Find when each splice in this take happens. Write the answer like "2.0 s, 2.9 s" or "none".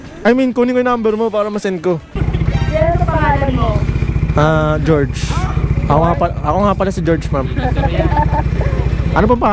2.2 s